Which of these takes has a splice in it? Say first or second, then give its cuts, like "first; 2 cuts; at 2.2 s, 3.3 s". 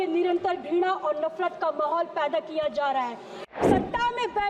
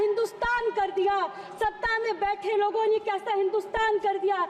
first; 1 cut; at 3.3 s